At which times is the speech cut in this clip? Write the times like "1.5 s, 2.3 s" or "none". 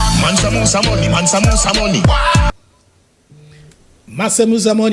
none